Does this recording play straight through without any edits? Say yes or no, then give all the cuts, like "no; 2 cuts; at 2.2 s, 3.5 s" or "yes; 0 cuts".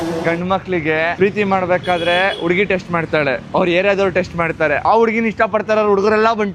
yes; 0 cuts